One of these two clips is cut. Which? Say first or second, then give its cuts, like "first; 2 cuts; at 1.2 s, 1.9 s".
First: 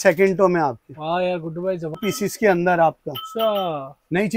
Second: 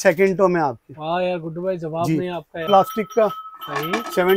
first; 1 cut; at 2.0 s